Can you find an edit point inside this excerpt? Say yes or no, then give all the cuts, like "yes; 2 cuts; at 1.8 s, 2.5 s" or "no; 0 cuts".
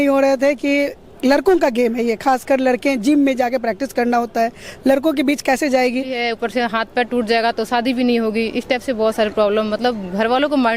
yes; 1 cut; at 6.2 s